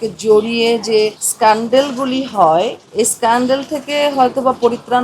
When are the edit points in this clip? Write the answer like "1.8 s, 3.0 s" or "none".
1.2 s, 2.8 s